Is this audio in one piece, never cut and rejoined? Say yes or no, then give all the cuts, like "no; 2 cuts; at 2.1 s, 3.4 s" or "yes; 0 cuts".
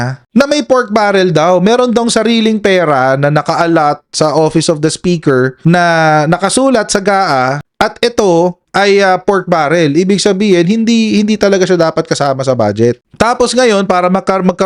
yes; 0 cuts